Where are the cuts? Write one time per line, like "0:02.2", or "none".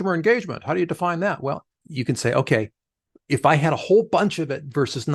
0:01.7